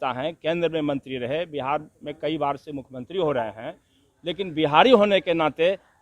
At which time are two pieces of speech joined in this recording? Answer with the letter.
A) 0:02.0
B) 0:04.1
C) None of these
B